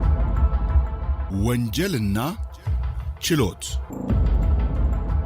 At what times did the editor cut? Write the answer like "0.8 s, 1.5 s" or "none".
1.3 s, 3.8 s